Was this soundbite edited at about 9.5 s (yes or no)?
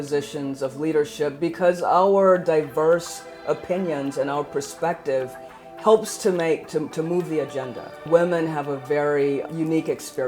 yes